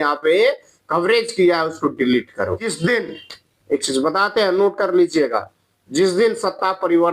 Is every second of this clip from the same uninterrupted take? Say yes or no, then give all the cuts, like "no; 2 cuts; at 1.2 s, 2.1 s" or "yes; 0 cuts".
no; 1 cut; at 2.7 s